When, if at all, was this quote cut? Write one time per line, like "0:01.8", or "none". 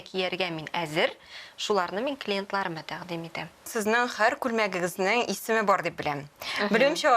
0:03.7